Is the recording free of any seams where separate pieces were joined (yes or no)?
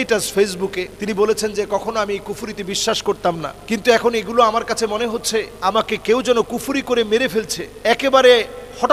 no